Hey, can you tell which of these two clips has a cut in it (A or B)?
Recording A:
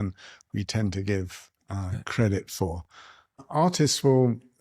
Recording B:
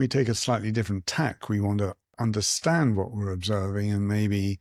A